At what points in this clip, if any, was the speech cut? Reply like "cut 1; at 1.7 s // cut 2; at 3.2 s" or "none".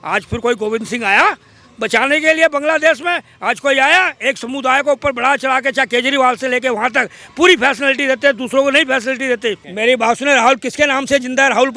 cut 1; at 9.7 s